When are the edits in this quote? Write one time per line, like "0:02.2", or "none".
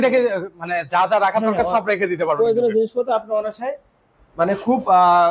none